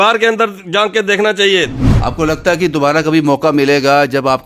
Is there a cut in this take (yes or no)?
yes